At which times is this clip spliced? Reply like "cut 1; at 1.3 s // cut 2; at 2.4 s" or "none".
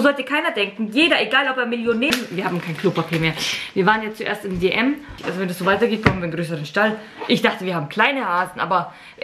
cut 1; at 2.1 s // cut 2; at 5.2 s